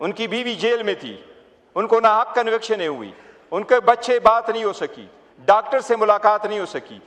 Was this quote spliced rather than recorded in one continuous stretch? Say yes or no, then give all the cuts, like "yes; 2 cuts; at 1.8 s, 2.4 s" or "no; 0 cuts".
no; 0 cuts